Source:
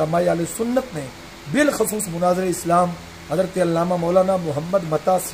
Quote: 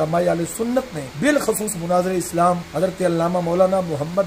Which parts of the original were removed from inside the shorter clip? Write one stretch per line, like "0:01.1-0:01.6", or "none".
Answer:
0:01.0-0:01.3
0:03.0-0:03.2